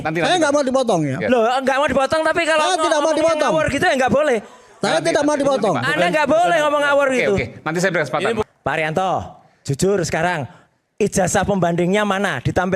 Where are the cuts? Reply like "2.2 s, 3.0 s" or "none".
8.4 s